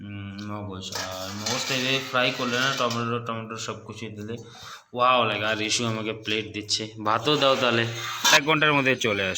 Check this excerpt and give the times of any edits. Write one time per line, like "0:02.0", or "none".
0:08.3